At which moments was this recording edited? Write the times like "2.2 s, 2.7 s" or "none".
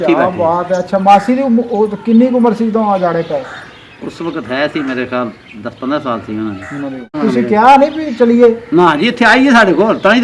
7.1 s